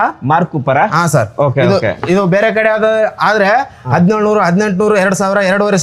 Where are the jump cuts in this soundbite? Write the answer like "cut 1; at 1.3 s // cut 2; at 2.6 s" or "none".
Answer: none